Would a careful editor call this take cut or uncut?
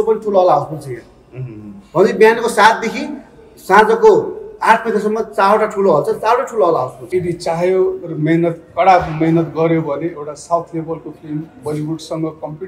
cut